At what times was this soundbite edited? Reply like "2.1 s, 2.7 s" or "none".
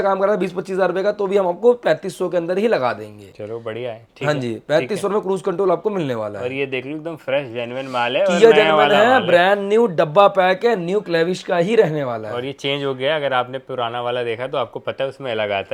none

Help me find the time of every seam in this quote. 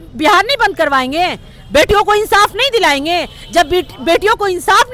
none

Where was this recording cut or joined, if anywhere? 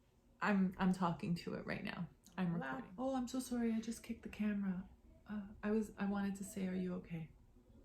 2.8 s

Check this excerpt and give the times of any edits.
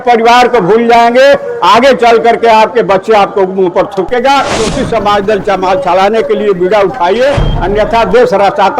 4.6 s

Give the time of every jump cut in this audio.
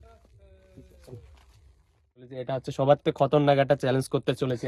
2.3 s

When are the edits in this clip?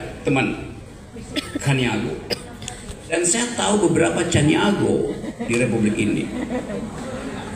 1.1 s, 3.1 s

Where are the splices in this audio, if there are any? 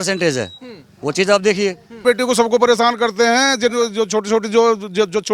2.0 s

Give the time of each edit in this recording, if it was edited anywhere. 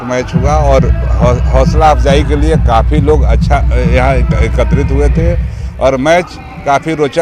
none

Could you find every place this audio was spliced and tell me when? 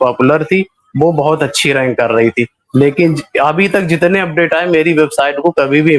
none

